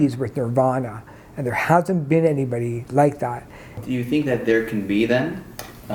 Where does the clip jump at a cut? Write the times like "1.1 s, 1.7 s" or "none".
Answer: 3.8 s